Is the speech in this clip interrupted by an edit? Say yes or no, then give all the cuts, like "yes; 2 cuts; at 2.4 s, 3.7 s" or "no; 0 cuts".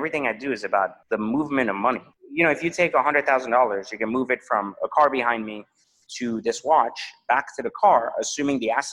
yes; 2 cuts; at 1.0 s, 2.2 s